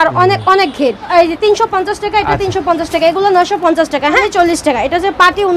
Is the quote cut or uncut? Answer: cut